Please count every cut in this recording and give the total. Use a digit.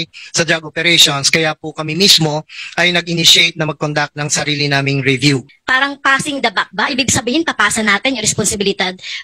1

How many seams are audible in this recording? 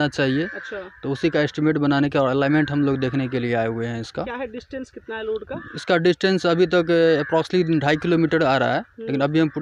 0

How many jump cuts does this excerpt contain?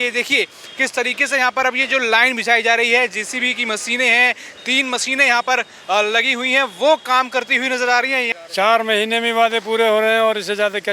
1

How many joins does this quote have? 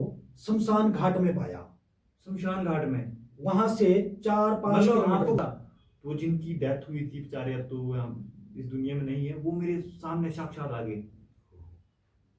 1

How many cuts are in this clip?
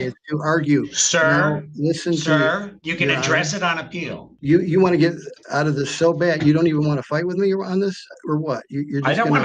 1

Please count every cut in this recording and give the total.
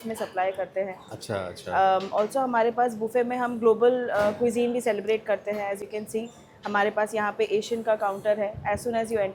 0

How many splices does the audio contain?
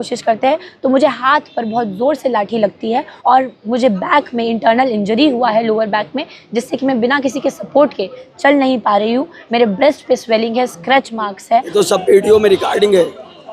2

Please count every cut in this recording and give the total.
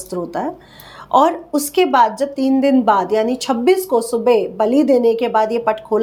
0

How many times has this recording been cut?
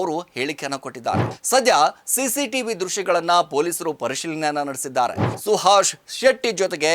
2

